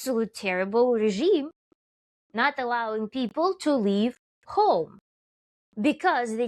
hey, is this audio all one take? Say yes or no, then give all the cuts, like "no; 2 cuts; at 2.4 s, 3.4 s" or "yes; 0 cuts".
yes; 0 cuts